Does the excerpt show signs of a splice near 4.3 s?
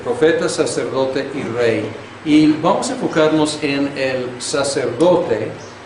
yes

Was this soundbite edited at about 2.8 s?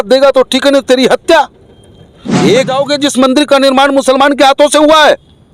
yes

